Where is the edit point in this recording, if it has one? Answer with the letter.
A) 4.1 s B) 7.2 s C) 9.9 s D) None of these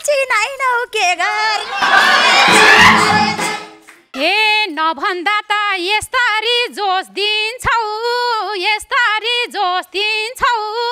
A